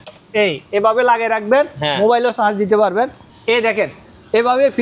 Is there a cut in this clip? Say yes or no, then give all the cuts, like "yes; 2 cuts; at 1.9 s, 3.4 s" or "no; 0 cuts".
no; 0 cuts